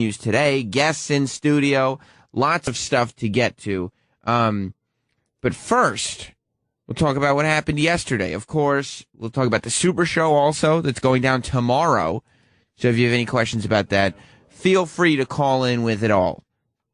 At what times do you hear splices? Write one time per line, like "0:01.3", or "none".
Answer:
none